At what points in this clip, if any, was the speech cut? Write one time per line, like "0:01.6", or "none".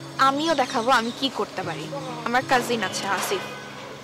0:02.3